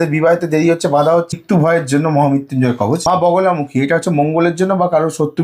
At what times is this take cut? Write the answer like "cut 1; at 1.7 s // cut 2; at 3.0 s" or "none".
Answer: cut 1; at 1.3 s // cut 2; at 3.0 s